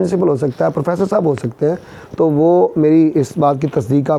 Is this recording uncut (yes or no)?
yes